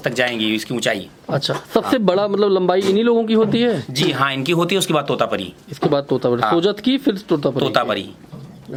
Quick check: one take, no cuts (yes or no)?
yes